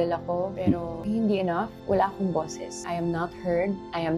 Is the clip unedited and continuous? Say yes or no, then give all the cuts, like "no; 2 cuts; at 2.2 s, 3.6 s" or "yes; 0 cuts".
no; 1 cut; at 1.7 s